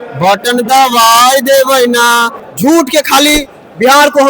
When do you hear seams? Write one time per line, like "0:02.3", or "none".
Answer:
0:02.4